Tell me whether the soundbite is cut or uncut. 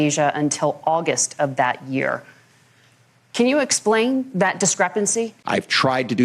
cut